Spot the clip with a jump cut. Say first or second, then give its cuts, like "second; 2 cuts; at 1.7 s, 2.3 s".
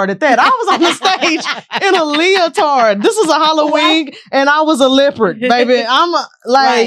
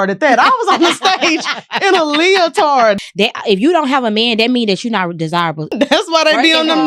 second; 2 cuts; at 3.0 s, 5.7 s